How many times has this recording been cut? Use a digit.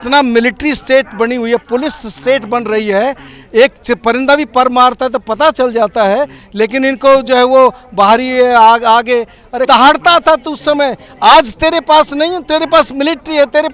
1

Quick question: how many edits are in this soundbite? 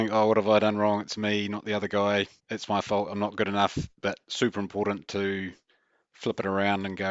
1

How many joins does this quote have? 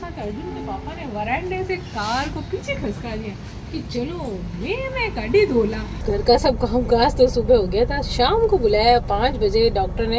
1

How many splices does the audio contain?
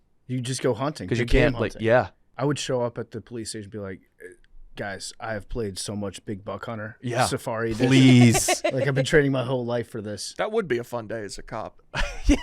2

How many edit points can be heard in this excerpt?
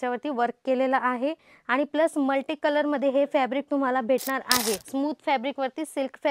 1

